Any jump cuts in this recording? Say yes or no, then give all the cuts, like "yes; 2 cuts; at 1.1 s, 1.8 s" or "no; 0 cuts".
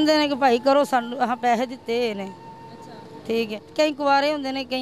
yes; 1 cut; at 3.6 s